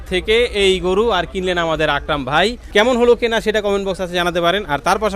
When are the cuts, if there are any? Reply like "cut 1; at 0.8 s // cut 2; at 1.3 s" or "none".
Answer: cut 1; at 2.6 s